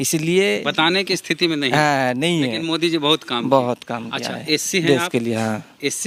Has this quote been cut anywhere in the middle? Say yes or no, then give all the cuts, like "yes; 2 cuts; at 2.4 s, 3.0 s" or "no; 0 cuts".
no; 0 cuts